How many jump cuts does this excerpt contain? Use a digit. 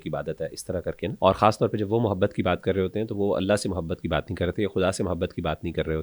1